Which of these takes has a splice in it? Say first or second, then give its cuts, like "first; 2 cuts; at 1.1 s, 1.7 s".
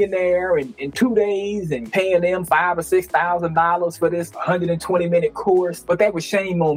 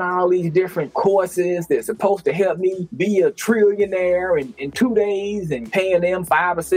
first; 1 cut; at 5.8 s